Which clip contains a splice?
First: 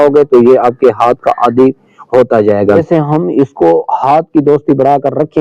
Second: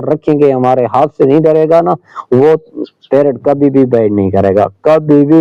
first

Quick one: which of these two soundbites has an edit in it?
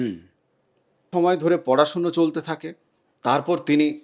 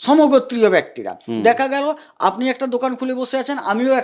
first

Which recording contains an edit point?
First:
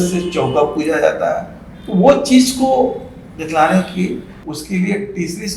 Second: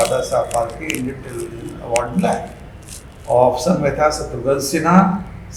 first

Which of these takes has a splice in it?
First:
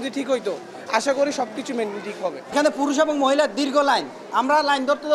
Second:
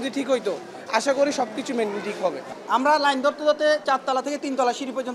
second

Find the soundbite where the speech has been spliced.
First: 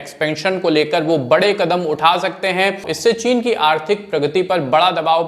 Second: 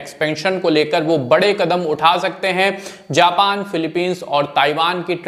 first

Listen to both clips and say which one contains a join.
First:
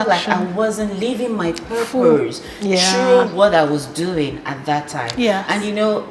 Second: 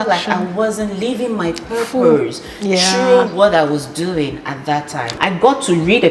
second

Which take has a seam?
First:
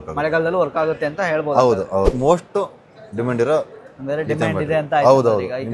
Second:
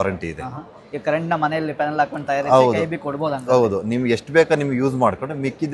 first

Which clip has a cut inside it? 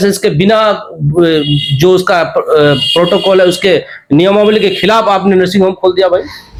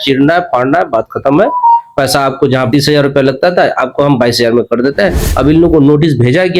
second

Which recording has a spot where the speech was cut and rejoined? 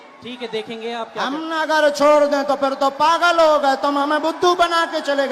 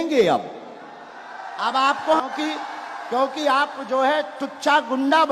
second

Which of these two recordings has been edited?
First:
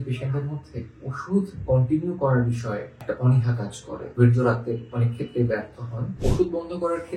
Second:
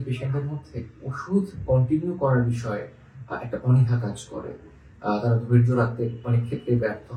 first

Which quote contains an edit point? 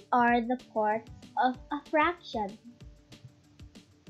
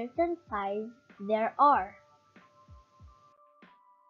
second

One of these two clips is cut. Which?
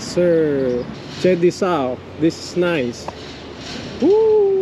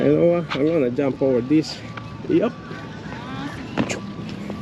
first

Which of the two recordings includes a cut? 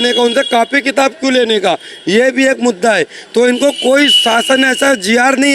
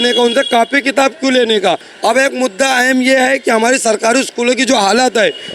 second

